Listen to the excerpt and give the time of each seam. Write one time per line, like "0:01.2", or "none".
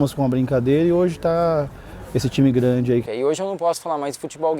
0:03.0